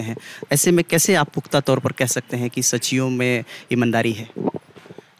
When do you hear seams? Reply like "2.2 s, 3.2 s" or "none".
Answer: none